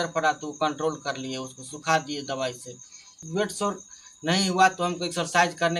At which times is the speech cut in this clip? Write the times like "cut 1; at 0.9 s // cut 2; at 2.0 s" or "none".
none